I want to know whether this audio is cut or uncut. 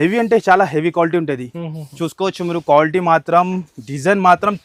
uncut